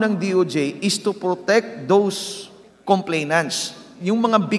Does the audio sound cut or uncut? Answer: uncut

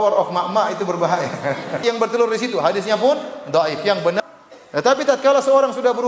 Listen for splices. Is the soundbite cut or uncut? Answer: cut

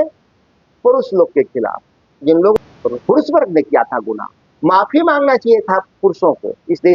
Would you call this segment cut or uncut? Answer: cut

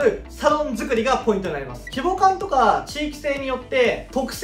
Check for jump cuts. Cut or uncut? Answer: cut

